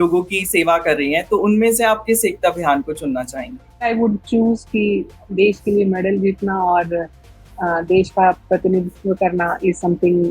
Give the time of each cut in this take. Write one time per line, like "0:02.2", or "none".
0:03.8